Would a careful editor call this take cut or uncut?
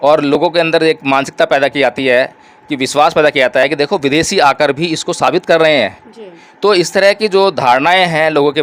uncut